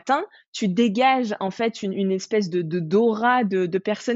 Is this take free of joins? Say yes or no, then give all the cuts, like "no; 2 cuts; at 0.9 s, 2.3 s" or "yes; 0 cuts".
yes; 0 cuts